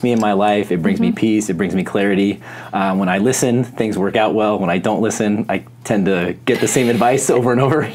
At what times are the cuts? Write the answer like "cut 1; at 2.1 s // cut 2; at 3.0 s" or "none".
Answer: none